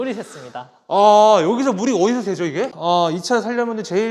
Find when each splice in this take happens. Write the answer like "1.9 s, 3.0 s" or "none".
2.7 s